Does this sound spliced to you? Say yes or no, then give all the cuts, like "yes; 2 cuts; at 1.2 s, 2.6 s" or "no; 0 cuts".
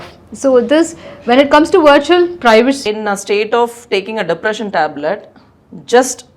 yes; 1 cut; at 2.8 s